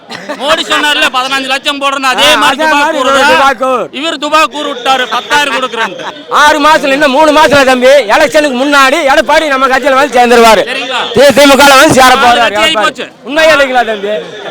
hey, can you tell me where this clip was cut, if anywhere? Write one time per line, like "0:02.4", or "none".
0:06.1

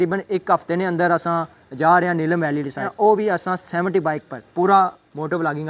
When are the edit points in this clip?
0:02.9
0:04.4

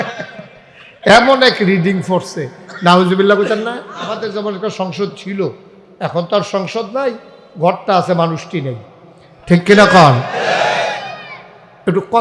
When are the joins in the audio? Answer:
0:04.2

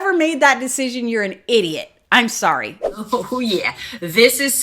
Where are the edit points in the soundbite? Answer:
0:02.8

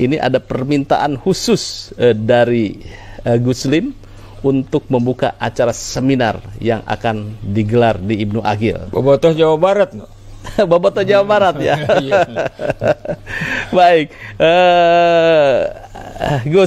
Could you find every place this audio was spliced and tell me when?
none

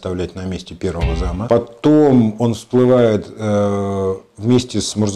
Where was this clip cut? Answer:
0:01.4

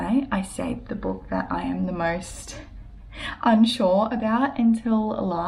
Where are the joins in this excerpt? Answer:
none

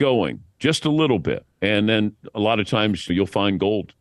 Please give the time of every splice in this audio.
0:01.5
0:03.1

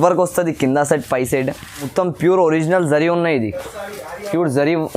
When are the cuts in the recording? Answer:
0:01.9

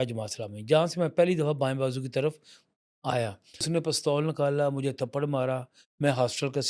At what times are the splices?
0:03.6

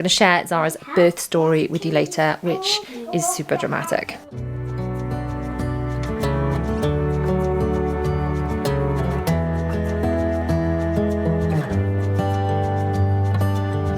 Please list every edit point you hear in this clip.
none

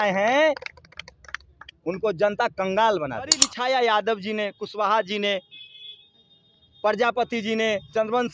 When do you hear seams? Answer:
0:03.5

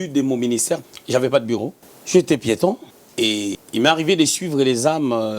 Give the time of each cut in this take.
0:00.8
0:03.6

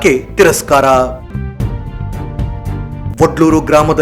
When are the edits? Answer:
0:01.2
0:03.1

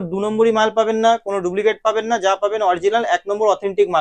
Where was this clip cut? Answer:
none

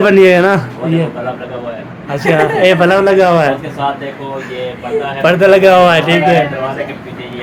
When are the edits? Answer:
none

